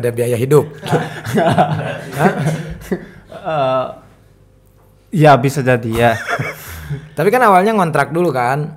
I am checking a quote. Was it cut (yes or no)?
no